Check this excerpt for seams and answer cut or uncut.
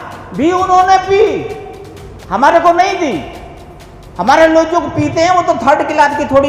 uncut